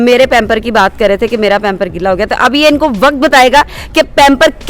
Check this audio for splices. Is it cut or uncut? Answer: uncut